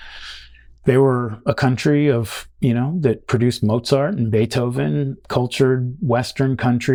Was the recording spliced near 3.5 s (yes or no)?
no